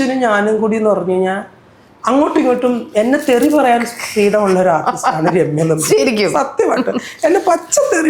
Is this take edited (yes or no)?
no